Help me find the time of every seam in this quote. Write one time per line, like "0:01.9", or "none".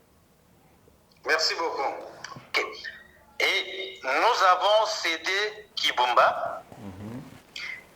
0:02.5